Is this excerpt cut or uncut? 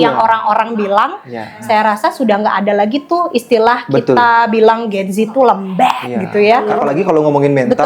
cut